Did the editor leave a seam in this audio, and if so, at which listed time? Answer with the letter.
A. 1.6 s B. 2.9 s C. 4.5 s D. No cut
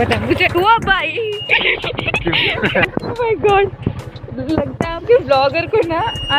B